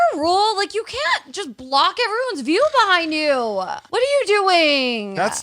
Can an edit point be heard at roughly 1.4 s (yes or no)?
no